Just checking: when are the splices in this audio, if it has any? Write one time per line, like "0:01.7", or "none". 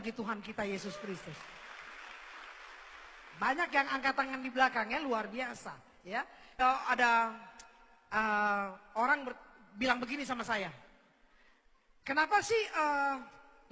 0:06.6

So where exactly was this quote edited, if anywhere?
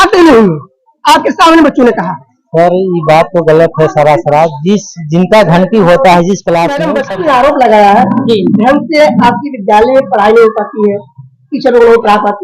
0:07.0

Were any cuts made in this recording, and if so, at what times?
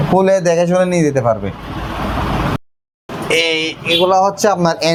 none

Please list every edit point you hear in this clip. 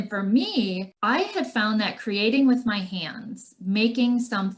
0:00.9

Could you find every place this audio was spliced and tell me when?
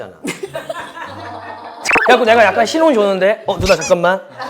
0:01.8

